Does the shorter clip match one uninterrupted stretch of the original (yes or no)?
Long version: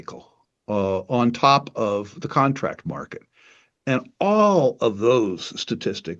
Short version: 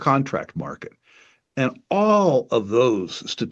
yes